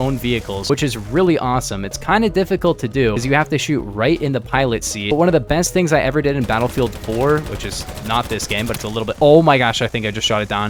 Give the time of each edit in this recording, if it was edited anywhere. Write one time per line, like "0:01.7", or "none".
none